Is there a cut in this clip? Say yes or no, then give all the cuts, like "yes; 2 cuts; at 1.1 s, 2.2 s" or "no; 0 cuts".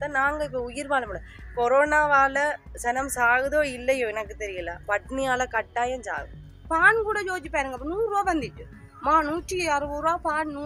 yes; 1 cut; at 6.6 s